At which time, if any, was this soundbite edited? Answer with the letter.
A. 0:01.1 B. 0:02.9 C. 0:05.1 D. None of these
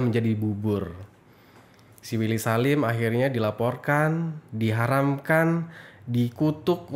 D